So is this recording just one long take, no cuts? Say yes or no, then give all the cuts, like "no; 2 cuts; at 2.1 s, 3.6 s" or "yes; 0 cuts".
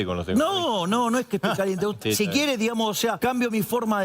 no; 2 cuts; at 2.0 s, 3.2 s